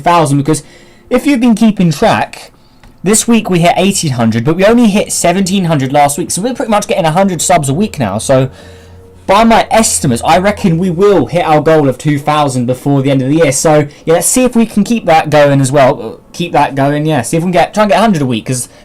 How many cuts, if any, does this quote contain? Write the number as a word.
one